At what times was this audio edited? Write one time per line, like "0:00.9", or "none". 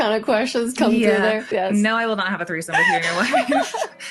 0:01.4

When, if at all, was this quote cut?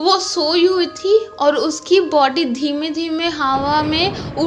none

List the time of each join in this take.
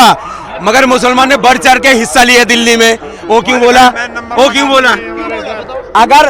none

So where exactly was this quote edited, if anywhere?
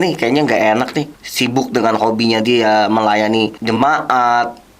0:01.2
0:03.6

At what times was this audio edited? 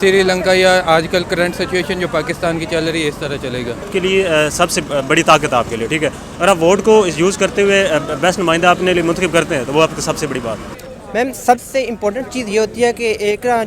0:03.9
0:10.8

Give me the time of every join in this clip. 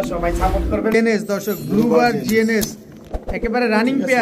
0:00.9

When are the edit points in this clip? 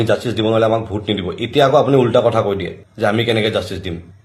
none

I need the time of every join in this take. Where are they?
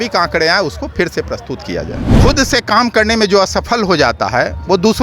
0:02.1

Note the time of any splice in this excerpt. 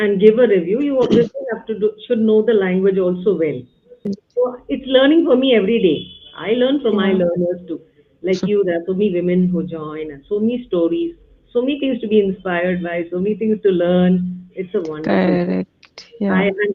0:04.2

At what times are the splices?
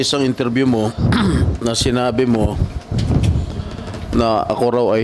none

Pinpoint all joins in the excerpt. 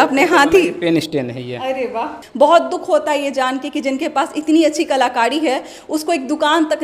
0:02.1

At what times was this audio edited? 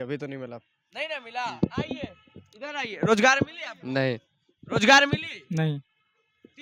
none

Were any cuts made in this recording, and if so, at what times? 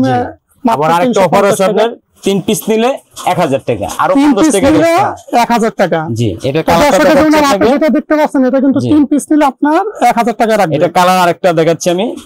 none

